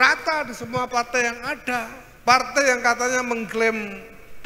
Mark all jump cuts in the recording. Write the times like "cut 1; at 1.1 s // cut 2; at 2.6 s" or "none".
cut 1; at 2.0 s